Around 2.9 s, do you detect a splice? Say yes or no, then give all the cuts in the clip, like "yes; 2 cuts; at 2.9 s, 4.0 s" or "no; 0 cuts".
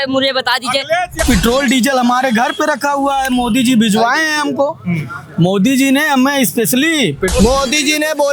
no; 2 cuts; at 1.2 s, 7.3 s